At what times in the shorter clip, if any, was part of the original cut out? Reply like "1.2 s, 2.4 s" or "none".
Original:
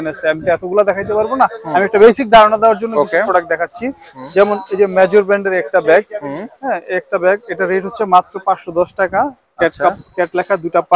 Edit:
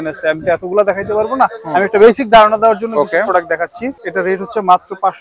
4.0 s